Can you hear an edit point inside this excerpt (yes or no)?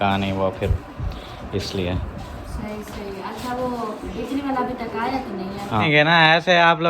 yes